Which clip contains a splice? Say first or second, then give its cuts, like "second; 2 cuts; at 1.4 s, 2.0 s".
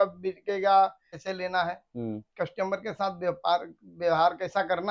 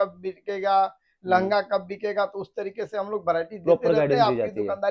first; 1 cut; at 1.1 s